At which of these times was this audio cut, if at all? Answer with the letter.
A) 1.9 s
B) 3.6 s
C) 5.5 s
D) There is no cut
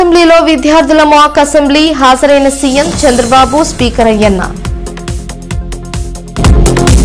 D